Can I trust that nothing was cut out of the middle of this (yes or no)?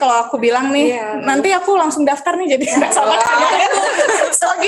yes